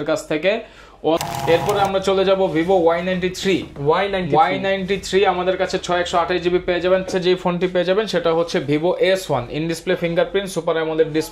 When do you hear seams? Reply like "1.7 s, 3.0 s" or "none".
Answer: 1.2 s, 7.1 s